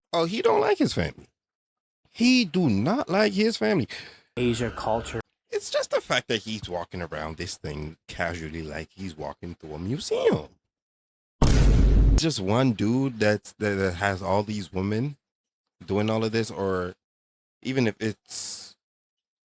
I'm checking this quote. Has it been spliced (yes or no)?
yes